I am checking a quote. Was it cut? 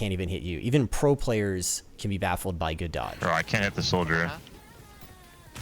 yes; 1 cut; at 3.1 s

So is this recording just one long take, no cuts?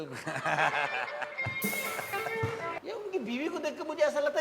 no; 1 cut; at 2.8 s

